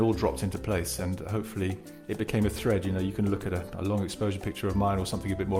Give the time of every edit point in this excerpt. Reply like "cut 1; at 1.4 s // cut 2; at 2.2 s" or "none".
cut 1; at 1.9 s